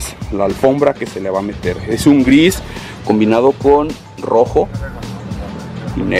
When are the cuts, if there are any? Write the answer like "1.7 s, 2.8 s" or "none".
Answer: none